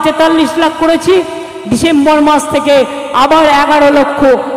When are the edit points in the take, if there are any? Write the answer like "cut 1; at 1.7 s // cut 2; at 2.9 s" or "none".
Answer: none